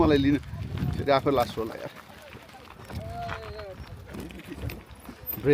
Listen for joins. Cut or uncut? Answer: cut